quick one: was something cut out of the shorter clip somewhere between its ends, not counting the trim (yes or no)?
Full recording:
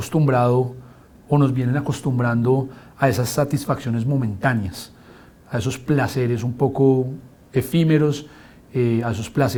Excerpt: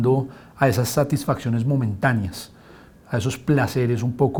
no